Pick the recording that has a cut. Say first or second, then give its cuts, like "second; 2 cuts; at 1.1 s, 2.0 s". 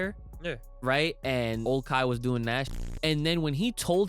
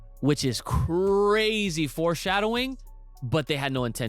first; 2 cuts; at 1.6 s, 2.7 s